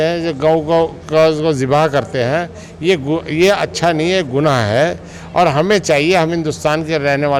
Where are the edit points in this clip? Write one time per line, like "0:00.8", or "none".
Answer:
none